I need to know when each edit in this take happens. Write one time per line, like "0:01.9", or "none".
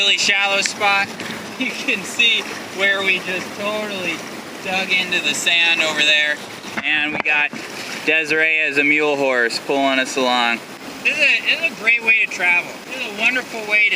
0:12.8